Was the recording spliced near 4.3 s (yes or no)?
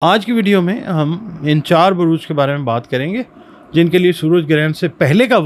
no